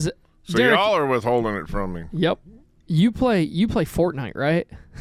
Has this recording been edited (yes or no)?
no